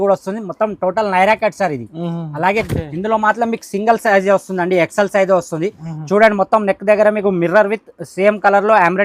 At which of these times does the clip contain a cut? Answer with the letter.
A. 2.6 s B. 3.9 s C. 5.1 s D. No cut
A